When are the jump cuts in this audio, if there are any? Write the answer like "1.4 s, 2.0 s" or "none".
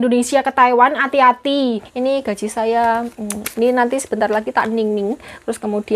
1.9 s

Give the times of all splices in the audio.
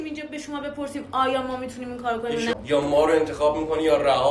2.5 s

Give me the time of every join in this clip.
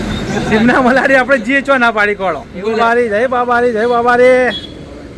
2.8 s

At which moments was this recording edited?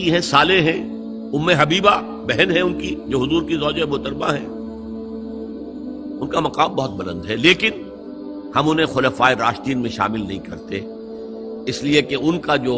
4.9 s, 6.2 s

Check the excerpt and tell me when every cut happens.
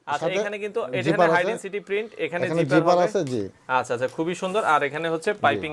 none

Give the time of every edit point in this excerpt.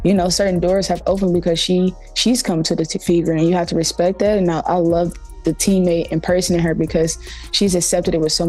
4.5 s

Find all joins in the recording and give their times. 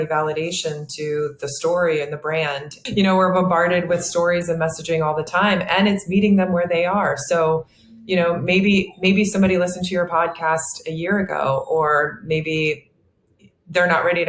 2.8 s

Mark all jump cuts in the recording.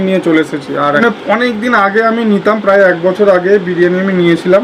1.0 s

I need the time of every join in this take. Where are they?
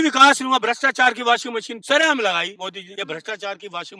1.7 s, 2.6 s

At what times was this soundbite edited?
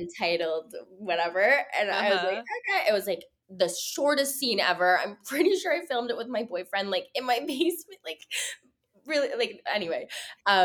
none

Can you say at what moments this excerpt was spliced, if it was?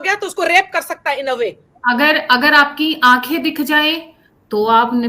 1.7 s

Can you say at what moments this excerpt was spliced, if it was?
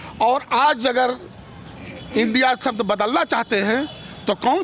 none

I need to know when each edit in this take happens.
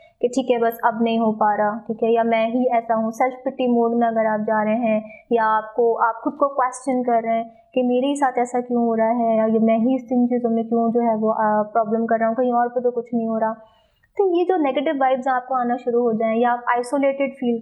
none

